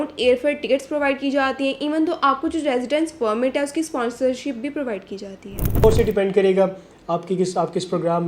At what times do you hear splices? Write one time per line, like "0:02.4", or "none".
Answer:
0:05.8